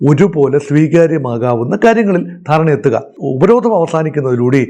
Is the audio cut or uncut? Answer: cut